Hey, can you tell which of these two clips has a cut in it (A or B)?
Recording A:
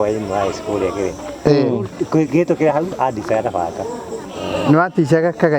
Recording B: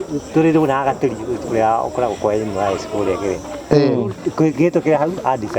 A